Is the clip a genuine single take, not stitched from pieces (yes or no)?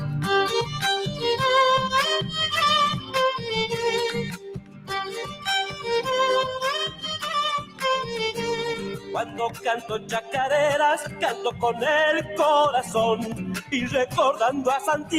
yes